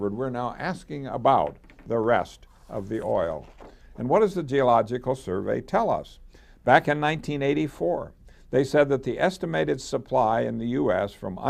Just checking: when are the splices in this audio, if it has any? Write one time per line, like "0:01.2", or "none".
0:04.4